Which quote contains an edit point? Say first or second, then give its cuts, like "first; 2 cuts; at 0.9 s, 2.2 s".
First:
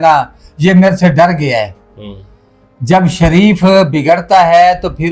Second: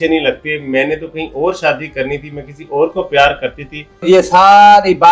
second; 1 cut; at 4.0 s